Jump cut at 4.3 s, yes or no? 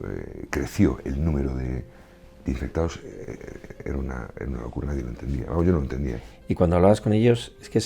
no